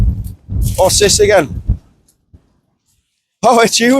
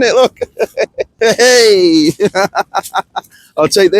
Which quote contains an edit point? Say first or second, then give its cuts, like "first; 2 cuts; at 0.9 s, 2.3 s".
second; 1 cut; at 1.1 s